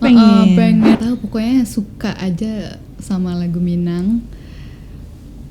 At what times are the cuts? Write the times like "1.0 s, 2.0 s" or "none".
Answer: 0.9 s